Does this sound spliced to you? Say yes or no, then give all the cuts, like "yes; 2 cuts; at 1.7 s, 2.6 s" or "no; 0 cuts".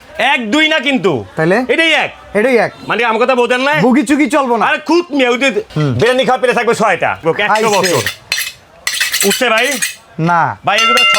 yes; 2 cuts; at 5.7 s, 7.2 s